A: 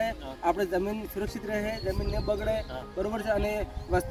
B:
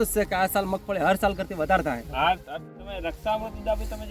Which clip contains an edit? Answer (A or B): B